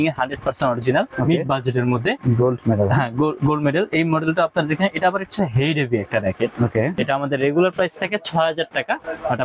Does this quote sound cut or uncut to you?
cut